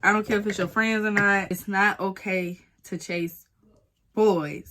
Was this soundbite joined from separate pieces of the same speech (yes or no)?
yes